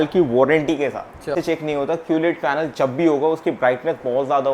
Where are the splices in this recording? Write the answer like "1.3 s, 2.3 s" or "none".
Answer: 1.3 s